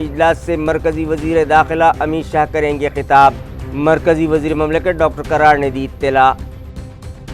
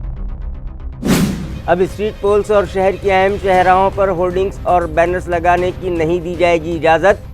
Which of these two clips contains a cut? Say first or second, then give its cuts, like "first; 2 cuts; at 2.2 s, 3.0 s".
second; 1 cut; at 1.0 s